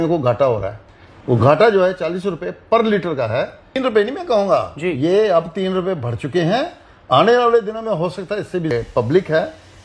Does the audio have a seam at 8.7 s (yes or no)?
yes